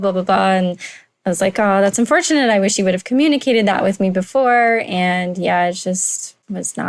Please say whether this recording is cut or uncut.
uncut